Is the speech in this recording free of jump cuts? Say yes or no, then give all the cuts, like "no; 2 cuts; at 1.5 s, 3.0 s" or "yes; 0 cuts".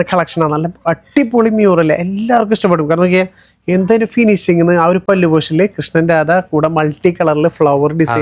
yes; 0 cuts